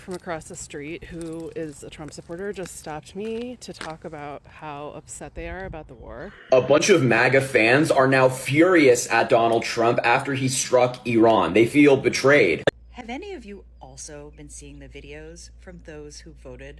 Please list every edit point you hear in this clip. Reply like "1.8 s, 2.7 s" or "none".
6.3 s, 12.7 s